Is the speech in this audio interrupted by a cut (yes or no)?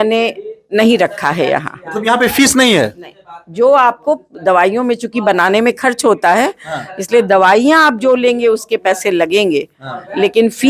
no